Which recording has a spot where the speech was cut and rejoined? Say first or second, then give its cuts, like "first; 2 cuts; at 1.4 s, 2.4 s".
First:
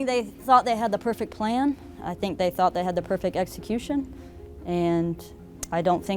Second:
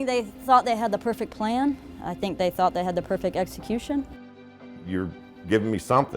second; 1 cut; at 4.6 s